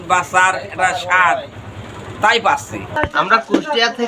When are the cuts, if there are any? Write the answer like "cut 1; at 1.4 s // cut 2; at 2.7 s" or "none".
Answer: cut 1; at 2.8 s